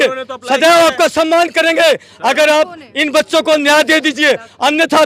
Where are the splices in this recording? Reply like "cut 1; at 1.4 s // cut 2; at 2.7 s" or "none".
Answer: none